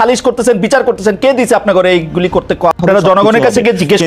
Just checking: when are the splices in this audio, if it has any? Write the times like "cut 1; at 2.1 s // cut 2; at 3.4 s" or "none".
cut 1; at 2.8 s